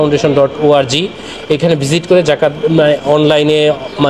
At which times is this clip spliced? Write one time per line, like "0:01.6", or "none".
none